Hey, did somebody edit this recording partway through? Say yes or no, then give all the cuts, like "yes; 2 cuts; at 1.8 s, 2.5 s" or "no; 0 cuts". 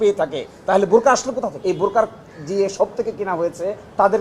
yes; 1 cut; at 1.6 s